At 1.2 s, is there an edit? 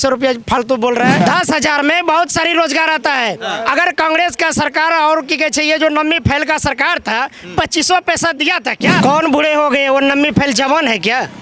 yes; 2 cuts; at 1.2 s, 9.0 s

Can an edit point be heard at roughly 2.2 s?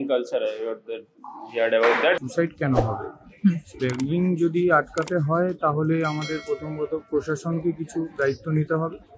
yes; 1 cut; at 2.2 s

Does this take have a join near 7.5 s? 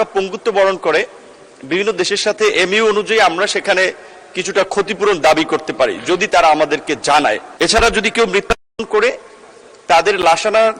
yes; 1 cut; at 7.5 s

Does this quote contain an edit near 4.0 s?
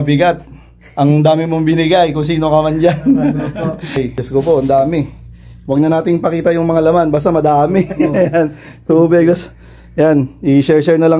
yes; 1 cut; at 4.0 s

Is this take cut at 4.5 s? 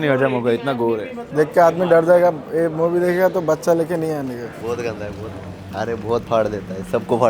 yes; 3 cuts; at 1.2 s, 4.5 s, 5.6 s

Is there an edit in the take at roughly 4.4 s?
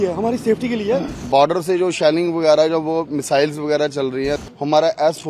yes; 2 cuts; at 1.2 s, 4.4 s

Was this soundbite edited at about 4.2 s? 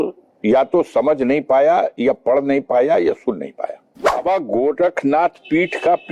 yes; 1 cut; at 4.2 s

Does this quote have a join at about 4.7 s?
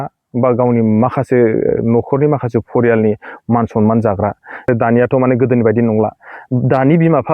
yes; 1 cut; at 4.7 s

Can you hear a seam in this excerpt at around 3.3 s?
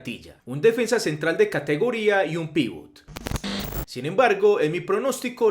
yes; 1 cut; at 3.3 s

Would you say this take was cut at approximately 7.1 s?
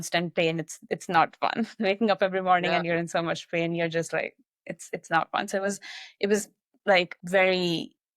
yes; 1 cut; at 7.1 s

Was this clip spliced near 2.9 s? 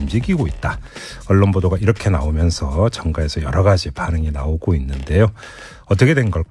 no; 0 cuts

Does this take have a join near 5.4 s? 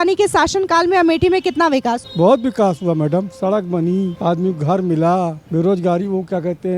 yes; 3 cuts; at 2.1 s, 4.1 s, 5.4 s

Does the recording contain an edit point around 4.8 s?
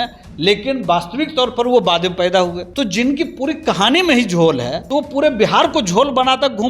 yes; 2 cuts; at 2.6 s, 4.8 s

